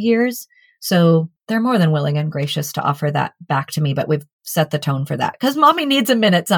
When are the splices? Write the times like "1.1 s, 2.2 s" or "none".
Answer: 1.4 s